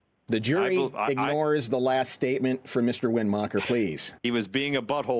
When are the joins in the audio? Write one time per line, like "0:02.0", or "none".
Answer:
0:04.1

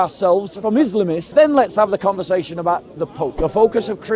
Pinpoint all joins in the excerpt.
0:01.2
0:03.3

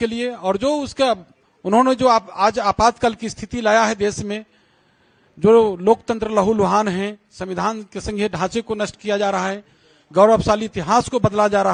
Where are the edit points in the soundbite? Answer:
none

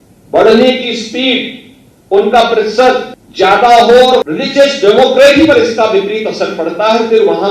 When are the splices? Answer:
0:03.2
0:04.3

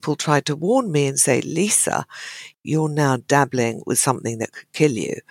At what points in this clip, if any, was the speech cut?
0:02.6

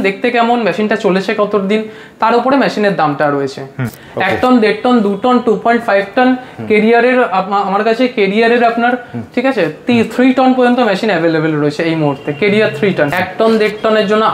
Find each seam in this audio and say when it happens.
0:03.8
0:13.2

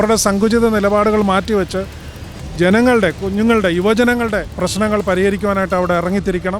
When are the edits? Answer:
0:04.5

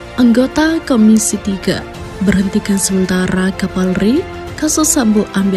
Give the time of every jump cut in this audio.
none

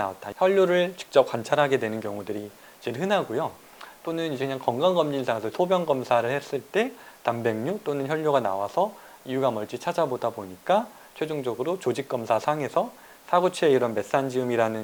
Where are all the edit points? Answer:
none

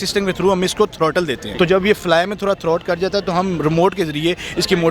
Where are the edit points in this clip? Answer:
0:01.4

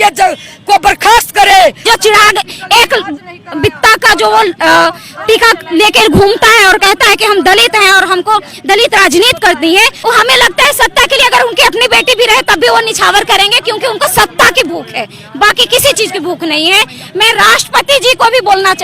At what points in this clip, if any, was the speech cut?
0:01.8
0:10.0

